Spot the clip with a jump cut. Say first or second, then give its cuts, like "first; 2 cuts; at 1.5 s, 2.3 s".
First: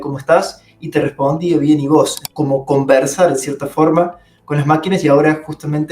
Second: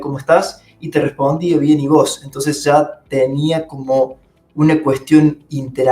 first; 1 cut; at 2.2 s